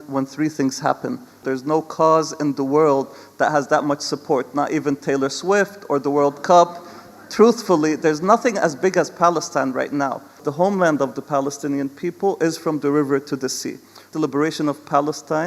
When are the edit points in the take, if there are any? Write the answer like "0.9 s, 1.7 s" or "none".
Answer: 1.4 s, 10.4 s, 14.1 s